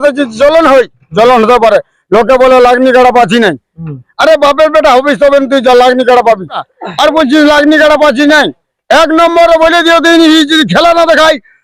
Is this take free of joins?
no; 1 cut; at 6.6 s

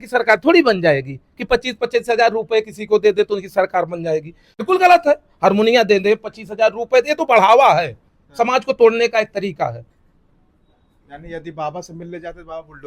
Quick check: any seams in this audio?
yes; 1 cut; at 4.6 s

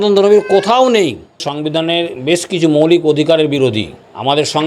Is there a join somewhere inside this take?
yes; 1 cut; at 1.5 s

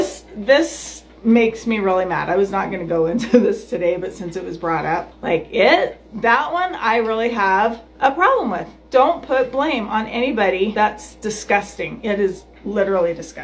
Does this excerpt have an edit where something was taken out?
yes; 3 cuts; at 5.1 s, 7.9 s, 10.7 s

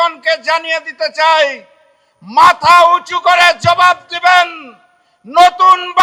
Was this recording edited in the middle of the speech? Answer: no; 0 cuts

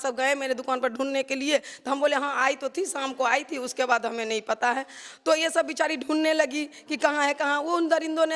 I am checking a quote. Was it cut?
no; 0 cuts

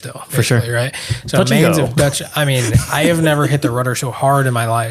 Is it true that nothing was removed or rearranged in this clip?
yes; 0 cuts

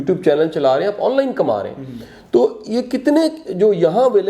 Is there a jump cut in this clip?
no; 0 cuts

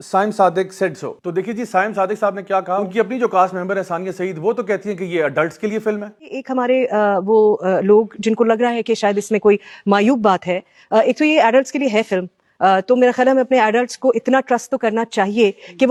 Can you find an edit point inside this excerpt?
no; 0 cuts

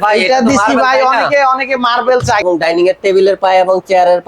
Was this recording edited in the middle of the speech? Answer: yes; 1 cut; at 2.4 s

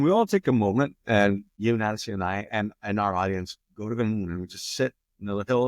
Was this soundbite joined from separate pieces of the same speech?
yes; 1 cut; at 1.5 s

